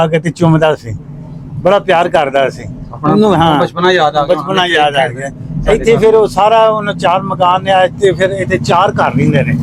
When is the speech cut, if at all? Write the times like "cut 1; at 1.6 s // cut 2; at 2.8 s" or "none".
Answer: none